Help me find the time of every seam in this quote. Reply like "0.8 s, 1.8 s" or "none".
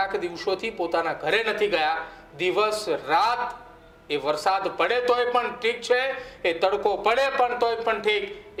none